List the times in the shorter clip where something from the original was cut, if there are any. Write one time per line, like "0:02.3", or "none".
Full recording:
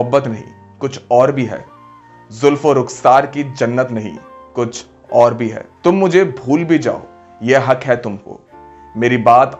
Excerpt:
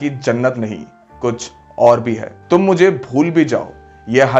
none

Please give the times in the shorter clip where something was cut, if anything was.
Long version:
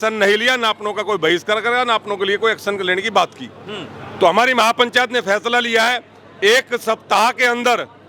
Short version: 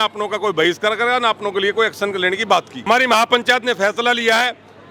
0:02.9

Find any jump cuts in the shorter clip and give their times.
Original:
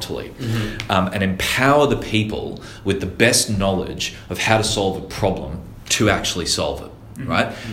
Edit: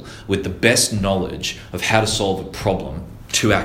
none

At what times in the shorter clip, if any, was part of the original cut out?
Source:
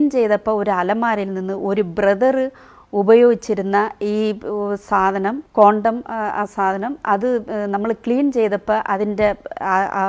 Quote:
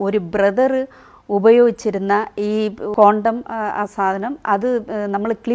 0:02.9

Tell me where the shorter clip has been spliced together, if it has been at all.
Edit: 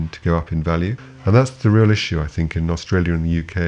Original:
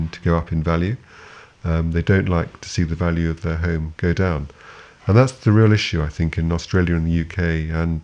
0:01.1

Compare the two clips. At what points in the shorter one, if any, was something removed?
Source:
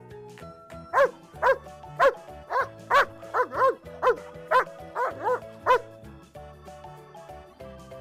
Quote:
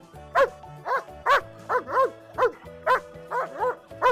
none

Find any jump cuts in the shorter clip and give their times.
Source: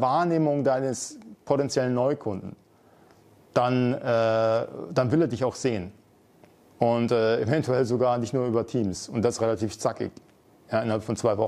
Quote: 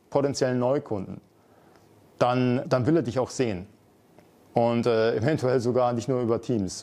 0:02.6

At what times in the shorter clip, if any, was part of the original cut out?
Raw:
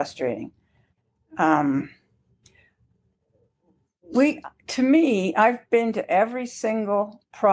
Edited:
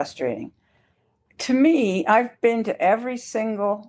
0:01.2

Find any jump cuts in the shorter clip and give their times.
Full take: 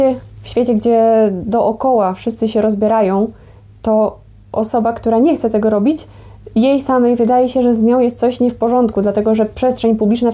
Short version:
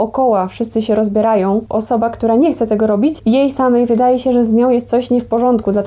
0:01.7
0:03.2

